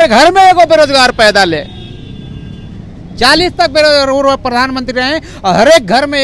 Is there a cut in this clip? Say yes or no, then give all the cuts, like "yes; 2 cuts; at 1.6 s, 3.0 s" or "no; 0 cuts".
no; 0 cuts